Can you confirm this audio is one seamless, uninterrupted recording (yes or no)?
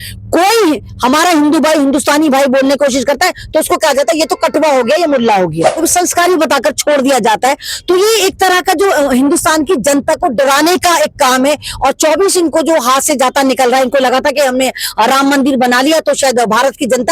no